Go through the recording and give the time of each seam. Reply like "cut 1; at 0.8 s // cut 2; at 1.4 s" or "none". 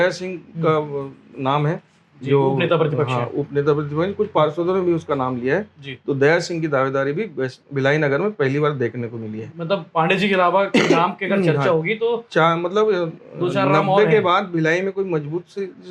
none

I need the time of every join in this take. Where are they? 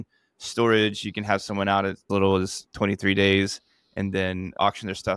cut 1; at 2.0 s

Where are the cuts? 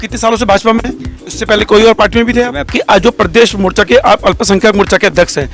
cut 1; at 1.2 s // cut 2; at 2.7 s

